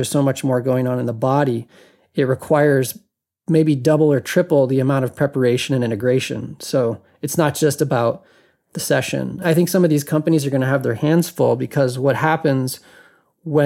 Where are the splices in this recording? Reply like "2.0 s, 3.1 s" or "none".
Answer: 9.4 s